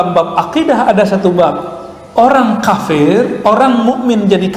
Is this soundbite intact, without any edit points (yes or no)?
yes